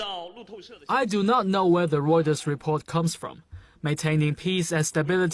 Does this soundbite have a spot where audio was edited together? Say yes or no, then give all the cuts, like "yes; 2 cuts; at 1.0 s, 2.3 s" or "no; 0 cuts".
no; 0 cuts